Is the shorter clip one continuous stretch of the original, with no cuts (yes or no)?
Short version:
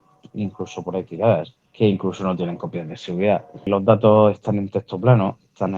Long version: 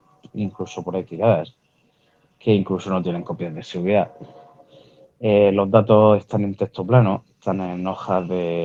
no